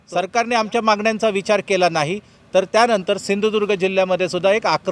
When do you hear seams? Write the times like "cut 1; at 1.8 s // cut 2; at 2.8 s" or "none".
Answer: none

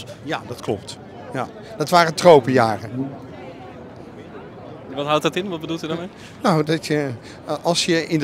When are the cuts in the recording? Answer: none

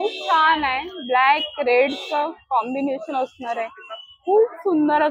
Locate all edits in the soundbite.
none

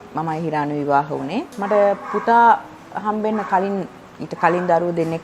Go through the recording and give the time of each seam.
cut 1; at 1.5 s

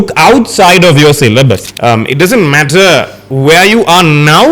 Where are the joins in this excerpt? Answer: cut 1; at 1.6 s

